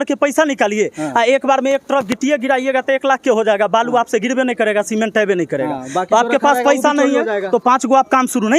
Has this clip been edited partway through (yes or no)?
no